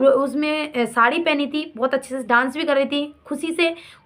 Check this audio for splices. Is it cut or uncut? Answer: uncut